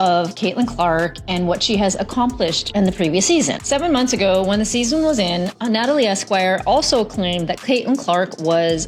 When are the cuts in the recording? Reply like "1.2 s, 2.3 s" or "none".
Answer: none